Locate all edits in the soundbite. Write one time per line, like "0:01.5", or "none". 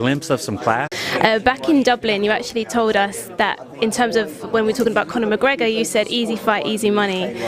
none